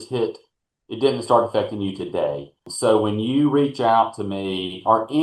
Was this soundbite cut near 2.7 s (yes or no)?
yes